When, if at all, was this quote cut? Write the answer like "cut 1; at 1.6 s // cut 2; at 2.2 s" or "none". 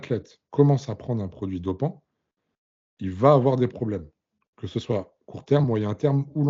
none